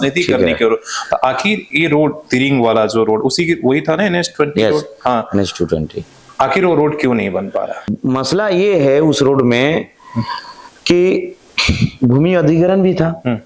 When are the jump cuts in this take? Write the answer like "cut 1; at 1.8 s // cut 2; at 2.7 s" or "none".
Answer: cut 1; at 6.2 s // cut 2; at 7.9 s